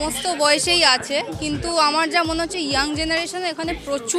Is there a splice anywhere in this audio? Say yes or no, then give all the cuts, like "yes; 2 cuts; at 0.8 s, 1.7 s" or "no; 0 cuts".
no; 0 cuts